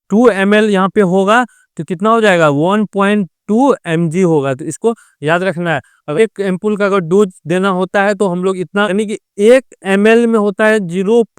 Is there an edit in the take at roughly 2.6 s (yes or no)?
no